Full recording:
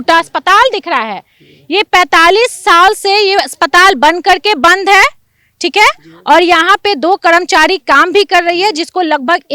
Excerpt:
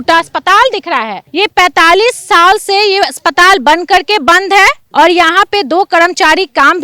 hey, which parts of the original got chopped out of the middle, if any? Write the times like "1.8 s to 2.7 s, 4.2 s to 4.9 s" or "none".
1.2 s to 1.5 s, 5.2 s to 6.1 s